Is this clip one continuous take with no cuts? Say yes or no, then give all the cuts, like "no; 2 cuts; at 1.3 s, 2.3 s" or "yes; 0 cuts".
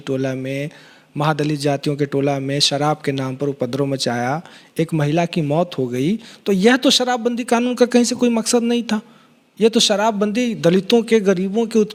yes; 0 cuts